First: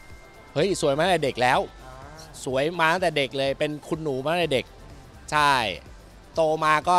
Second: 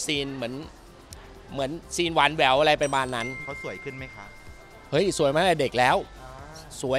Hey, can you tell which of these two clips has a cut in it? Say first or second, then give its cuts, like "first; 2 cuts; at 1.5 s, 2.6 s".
second; 1 cut; at 3.5 s